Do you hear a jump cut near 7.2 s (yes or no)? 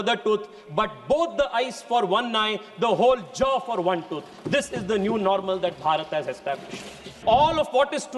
yes